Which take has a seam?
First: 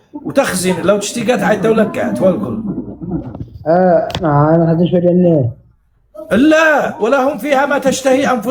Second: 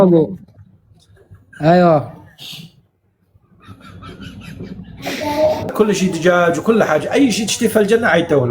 second; 1 cut; at 5.7 s

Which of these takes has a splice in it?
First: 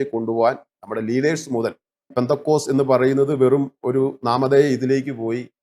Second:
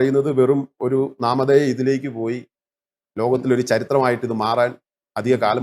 first; 1 cut; at 2.1 s

